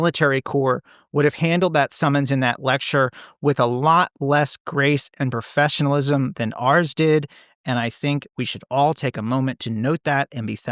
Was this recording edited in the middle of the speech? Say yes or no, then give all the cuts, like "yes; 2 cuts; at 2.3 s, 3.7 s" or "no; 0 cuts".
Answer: no; 0 cuts